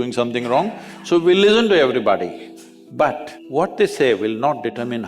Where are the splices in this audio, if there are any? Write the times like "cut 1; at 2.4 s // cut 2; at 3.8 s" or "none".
cut 1; at 3.3 s